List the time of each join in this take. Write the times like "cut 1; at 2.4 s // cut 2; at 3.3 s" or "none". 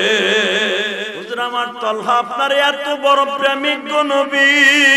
cut 1; at 1.1 s